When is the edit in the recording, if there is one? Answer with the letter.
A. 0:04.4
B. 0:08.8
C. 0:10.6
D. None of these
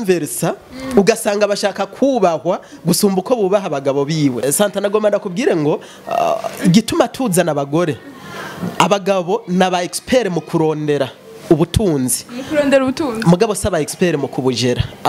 A